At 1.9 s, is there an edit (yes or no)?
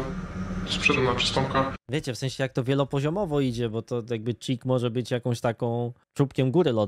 no